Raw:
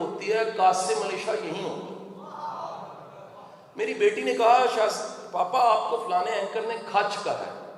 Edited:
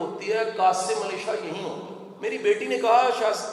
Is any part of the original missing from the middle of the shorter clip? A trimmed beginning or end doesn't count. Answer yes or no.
yes